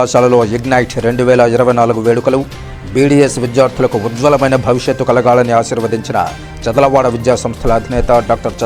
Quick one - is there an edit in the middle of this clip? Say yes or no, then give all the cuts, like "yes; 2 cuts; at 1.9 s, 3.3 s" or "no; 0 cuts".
no; 0 cuts